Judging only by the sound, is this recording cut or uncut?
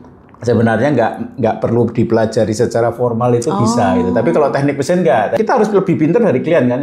cut